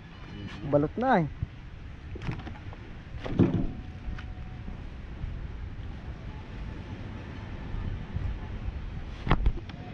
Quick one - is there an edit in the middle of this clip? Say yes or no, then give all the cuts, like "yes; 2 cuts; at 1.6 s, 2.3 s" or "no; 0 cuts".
no; 0 cuts